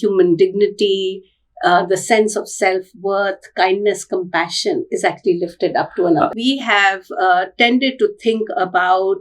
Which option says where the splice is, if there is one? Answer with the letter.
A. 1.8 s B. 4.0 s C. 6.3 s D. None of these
C